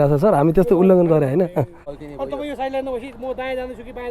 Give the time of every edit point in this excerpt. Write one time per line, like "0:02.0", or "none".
0:02.0